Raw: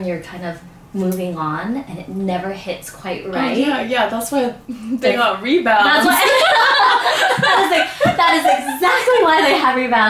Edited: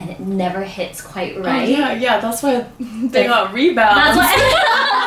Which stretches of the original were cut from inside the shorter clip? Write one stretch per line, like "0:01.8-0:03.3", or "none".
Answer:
none